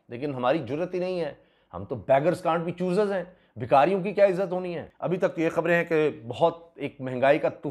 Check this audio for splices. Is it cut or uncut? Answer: cut